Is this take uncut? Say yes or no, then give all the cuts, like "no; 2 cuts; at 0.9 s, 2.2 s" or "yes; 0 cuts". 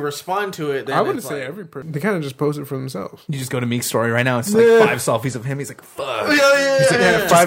no; 2 cuts; at 1.8 s, 3.2 s